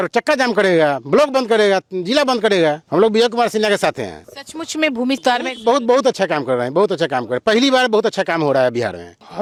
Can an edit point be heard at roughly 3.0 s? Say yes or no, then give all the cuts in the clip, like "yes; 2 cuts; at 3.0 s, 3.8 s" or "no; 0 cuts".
no; 0 cuts